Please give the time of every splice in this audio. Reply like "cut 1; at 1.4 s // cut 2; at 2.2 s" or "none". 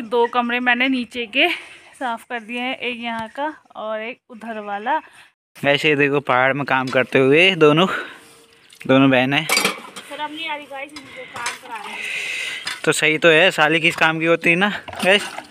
cut 1; at 5.4 s